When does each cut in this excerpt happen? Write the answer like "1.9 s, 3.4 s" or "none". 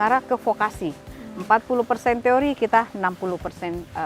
none